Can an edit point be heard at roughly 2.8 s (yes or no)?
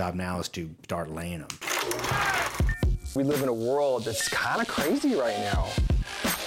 no